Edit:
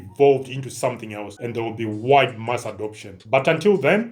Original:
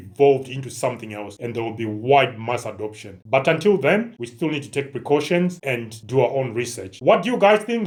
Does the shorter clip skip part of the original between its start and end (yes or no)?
no